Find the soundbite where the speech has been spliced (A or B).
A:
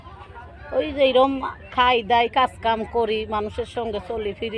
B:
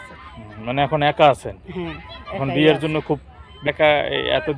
B